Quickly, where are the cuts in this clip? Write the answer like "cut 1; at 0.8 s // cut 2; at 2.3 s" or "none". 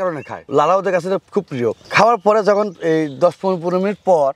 none